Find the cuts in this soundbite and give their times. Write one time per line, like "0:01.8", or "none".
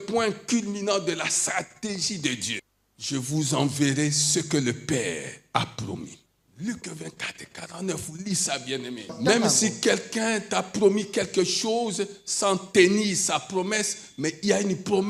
0:02.6
0:06.1
0:09.1